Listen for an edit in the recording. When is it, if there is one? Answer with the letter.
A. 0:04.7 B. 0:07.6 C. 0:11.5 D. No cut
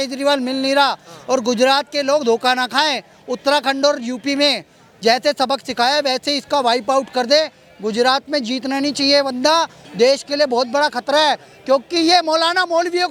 D